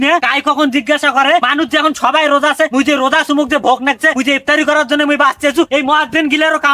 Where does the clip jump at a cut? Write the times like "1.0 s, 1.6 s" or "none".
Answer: none